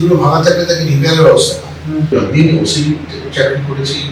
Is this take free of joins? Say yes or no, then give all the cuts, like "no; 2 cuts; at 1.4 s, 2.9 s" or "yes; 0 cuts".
no; 1 cut; at 2.1 s